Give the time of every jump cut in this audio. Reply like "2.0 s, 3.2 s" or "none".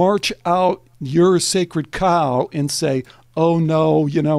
0.9 s